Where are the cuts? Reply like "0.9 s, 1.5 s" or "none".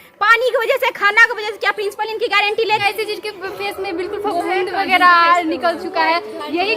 2.8 s